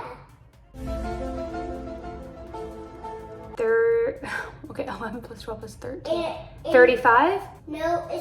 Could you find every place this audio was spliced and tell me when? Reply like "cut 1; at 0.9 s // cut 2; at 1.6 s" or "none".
none